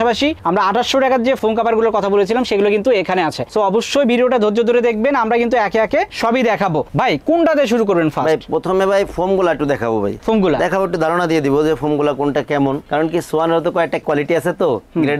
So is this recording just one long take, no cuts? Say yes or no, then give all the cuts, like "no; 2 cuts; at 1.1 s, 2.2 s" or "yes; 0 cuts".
yes; 0 cuts